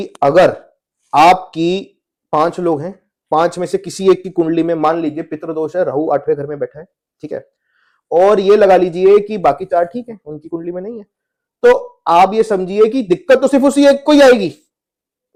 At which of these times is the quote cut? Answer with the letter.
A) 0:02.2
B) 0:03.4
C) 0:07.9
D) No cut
D